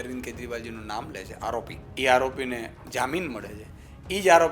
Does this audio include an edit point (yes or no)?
yes